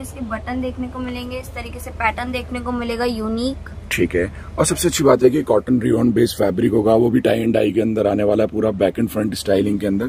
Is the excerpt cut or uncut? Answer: uncut